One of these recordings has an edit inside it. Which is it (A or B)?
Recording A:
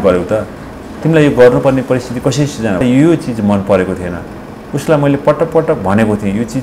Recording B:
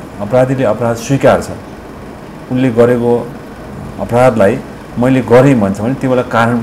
A